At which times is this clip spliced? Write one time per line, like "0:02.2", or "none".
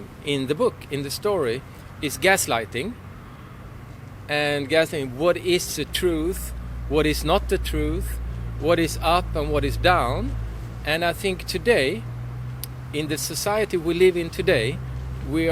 none